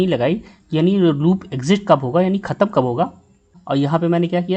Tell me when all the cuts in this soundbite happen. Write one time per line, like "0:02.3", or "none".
0:03.6